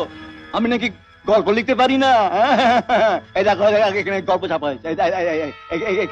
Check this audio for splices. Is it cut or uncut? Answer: uncut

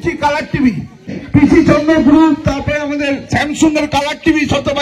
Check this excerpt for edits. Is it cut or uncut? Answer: cut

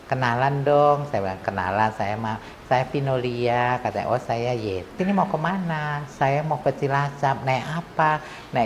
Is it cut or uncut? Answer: cut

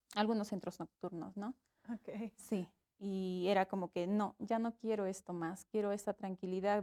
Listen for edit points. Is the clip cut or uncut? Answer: uncut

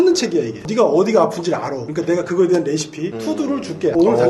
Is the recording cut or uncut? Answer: uncut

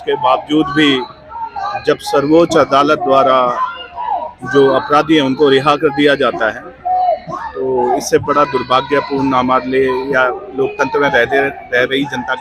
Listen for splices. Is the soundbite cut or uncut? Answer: uncut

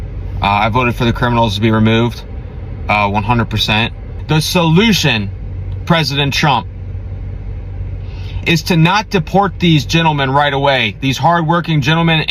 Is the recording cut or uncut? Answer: cut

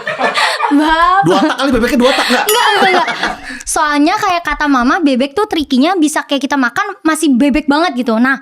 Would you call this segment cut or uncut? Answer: uncut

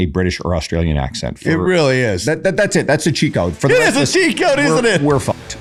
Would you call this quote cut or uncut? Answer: uncut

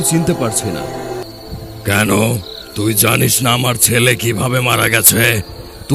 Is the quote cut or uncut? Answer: cut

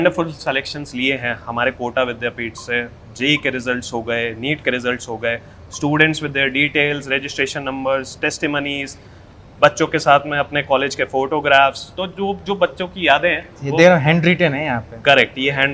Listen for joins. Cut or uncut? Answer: uncut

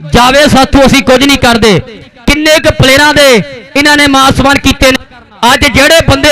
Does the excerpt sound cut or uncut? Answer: cut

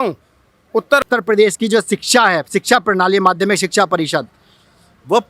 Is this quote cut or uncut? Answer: cut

